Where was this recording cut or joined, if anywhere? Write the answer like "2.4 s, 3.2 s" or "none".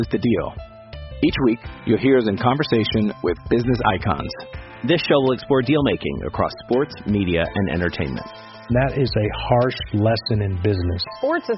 none